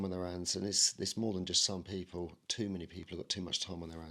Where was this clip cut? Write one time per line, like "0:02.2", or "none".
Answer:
none